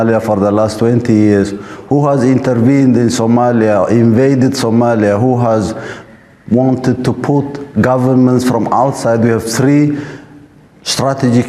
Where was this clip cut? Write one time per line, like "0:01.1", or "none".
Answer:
none